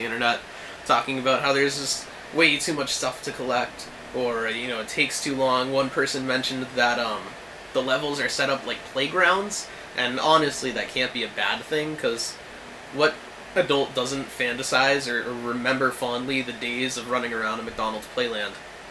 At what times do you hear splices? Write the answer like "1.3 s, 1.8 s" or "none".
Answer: none